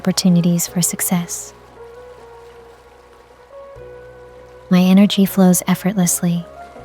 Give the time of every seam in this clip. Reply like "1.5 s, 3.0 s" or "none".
1.3 s, 4.4 s